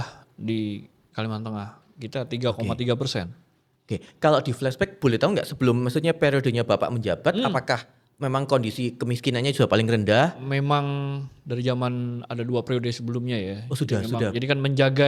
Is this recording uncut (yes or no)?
yes